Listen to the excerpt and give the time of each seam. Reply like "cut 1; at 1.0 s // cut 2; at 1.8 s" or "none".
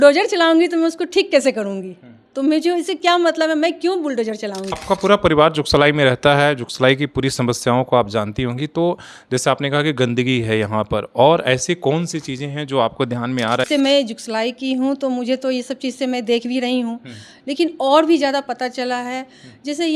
cut 1; at 4.7 s // cut 2; at 13.6 s